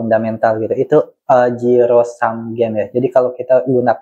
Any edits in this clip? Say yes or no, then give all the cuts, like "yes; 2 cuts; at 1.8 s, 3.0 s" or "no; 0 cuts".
no; 0 cuts